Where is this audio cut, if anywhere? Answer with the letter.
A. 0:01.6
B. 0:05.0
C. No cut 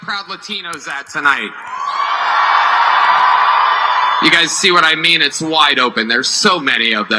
B